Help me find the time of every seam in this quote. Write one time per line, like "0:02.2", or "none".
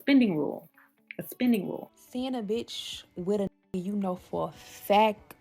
0:02.0